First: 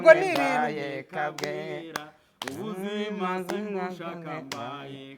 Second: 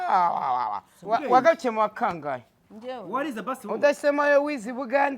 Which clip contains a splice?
second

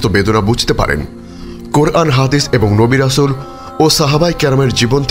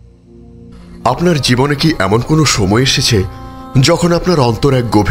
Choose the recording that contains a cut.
second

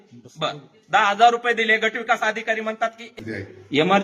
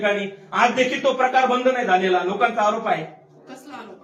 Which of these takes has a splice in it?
first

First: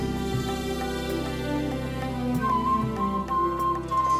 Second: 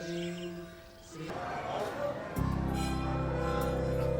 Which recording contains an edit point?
second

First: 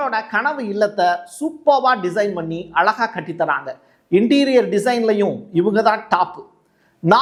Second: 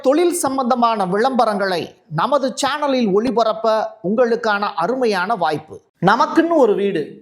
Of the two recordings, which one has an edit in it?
second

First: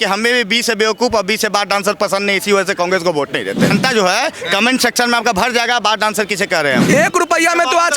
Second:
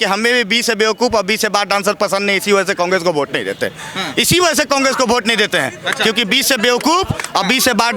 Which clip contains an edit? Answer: first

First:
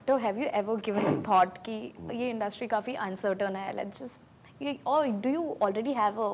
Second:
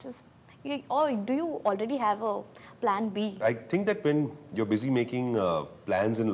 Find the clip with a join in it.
second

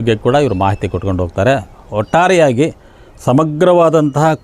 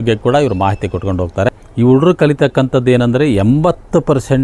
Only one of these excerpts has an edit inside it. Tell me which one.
second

